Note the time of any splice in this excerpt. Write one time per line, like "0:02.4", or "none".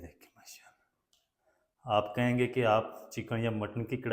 0:01.0